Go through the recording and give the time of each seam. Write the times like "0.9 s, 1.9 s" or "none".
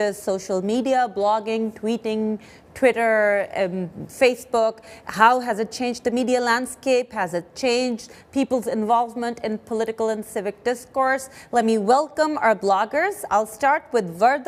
none